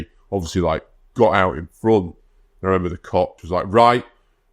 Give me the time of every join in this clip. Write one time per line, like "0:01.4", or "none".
0:03.4